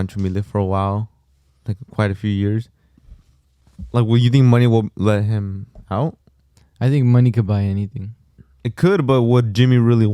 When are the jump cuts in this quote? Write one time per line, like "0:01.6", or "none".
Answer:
none

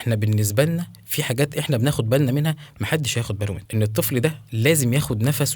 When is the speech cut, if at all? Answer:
0:03.6

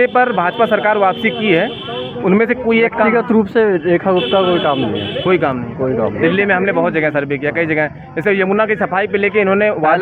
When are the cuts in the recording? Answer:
none

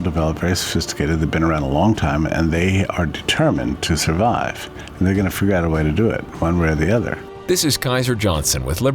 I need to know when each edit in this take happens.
0:07.3

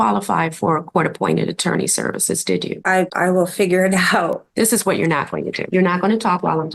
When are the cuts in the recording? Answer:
0:02.9
0:04.4
0:05.6

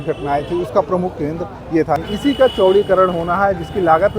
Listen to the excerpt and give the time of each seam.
0:02.0

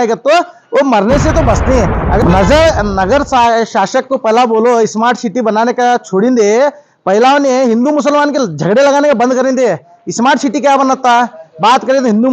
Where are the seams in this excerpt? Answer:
0:02.2

